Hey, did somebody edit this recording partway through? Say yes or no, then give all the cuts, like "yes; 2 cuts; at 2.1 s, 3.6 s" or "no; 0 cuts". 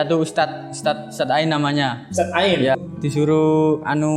yes; 1 cut; at 2.8 s